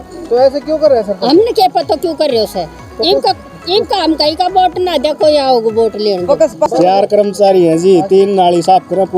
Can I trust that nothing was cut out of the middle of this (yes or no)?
no